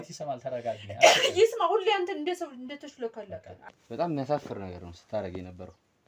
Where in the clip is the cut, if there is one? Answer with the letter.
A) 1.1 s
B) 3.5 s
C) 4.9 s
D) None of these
B